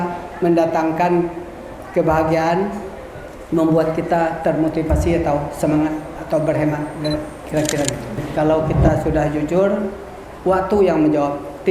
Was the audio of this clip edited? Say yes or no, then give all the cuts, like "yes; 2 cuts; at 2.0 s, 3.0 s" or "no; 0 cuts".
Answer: yes; 1 cut; at 8.2 s